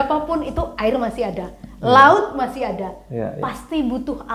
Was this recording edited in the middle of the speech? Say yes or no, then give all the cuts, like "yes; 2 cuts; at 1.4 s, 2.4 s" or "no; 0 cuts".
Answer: no; 0 cuts